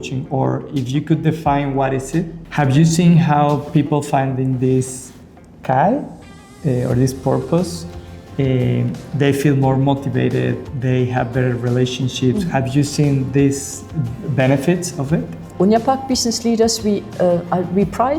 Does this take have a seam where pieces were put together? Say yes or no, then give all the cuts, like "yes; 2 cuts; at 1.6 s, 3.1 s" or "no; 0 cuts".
yes; 2 cuts; at 2.3 s, 15.4 s